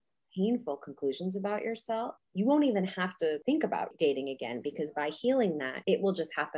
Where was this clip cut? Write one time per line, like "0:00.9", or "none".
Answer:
0:02.2
0:03.7
0:05.7